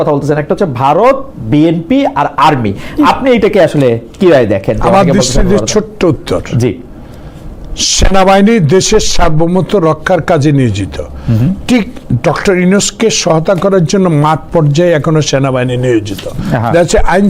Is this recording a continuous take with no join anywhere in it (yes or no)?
yes